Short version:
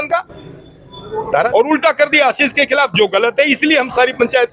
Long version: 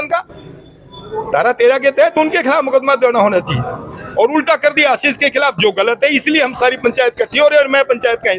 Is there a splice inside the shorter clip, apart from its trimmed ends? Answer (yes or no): yes